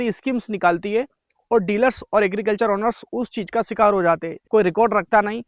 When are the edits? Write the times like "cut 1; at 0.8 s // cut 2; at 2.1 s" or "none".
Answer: cut 1; at 4.3 s